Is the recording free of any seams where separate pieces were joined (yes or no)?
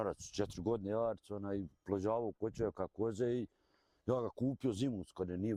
yes